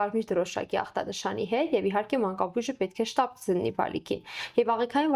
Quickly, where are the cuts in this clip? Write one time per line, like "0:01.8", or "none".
none